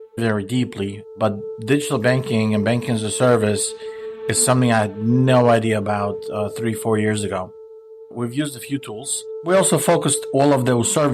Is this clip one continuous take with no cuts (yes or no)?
no